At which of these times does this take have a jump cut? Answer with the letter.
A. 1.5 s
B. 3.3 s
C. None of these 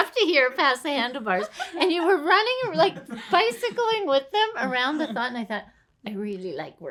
C